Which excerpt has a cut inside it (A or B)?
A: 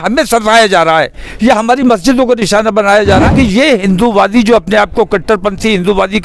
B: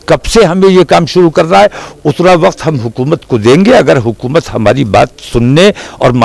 A